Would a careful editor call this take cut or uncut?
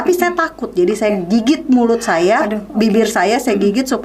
uncut